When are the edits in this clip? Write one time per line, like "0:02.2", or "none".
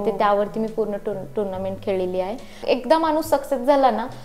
0:02.5